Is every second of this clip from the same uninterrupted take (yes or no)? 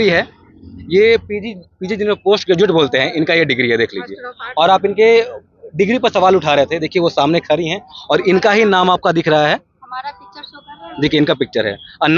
yes